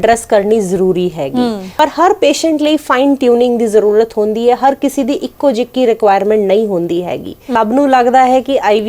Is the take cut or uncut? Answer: cut